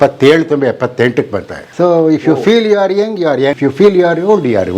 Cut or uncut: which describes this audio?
cut